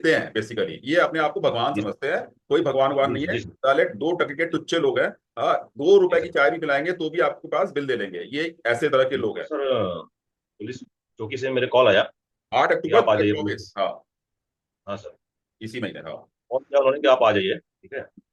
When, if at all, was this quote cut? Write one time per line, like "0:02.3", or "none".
0:09.4